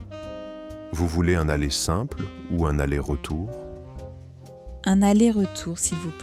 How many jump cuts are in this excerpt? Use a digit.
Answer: 1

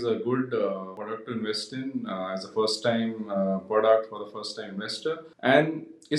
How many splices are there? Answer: 2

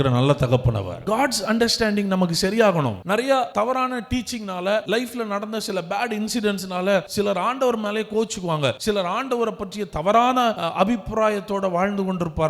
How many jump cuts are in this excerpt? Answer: 6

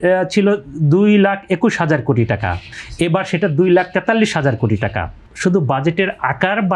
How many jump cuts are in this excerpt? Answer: 1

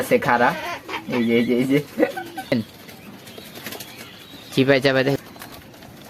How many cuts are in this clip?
2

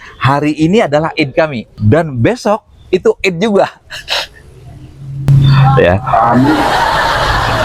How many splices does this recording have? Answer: 1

